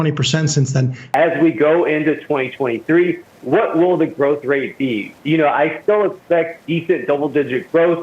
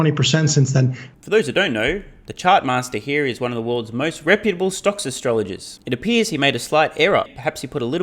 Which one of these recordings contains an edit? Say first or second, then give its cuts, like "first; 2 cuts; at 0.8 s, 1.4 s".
first; 1 cut; at 1.0 s